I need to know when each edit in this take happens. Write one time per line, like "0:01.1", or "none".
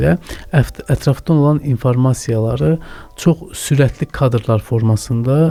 none